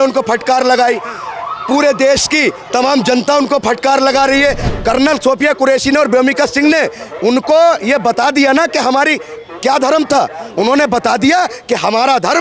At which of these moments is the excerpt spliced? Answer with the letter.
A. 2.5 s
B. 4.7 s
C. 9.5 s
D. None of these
B